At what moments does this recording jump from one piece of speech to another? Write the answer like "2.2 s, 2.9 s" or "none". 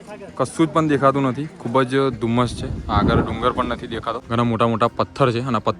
4.2 s

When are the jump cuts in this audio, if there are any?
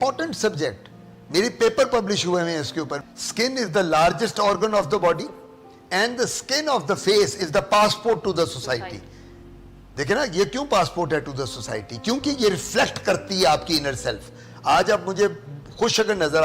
3.0 s

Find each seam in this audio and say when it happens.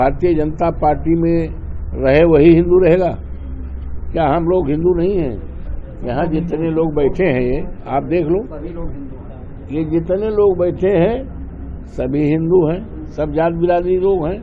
none

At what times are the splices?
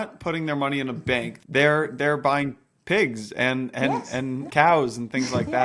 1.3 s, 4.4 s

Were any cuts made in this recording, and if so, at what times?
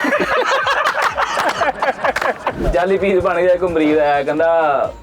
2.6 s

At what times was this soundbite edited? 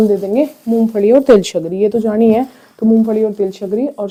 none

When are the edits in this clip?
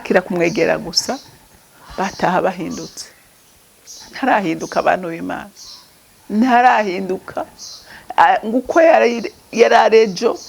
none

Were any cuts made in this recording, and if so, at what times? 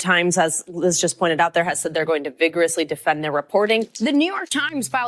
3.9 s

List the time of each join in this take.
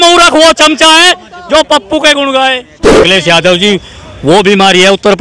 3.0 s

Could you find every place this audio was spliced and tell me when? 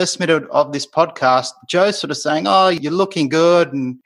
2.8 s

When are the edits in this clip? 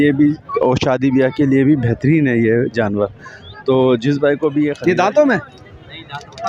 4.8 s

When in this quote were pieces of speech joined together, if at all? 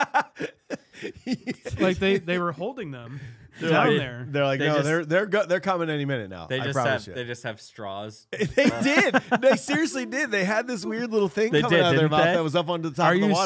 none

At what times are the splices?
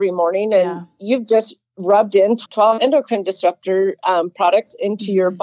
none

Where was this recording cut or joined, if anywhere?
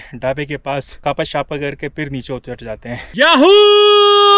0.9 s, 3.5 s

